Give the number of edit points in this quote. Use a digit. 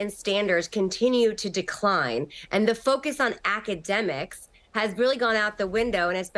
0